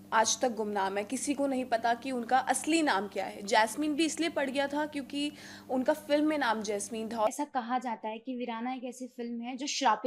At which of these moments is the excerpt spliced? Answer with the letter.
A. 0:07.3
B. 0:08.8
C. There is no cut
A